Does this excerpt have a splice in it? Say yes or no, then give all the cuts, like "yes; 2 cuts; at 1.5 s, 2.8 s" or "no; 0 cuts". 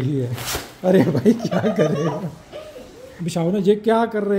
yes; 1 cut; at 3.2 s